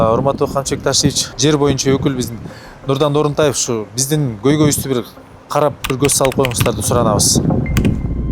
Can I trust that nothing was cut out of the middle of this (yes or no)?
no